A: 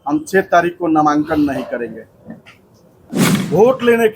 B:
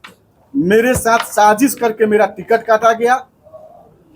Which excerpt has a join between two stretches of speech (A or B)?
A